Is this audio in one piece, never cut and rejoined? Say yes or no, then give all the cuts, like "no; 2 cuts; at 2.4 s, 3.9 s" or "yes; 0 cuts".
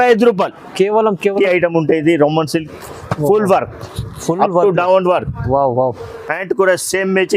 no; 1 cut; at 1.4 s